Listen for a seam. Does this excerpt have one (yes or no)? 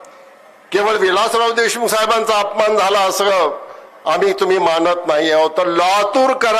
no